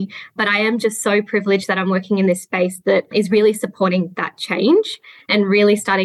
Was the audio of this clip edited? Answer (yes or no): yes